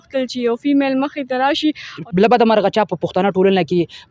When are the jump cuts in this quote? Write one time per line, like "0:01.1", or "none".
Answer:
0:01.9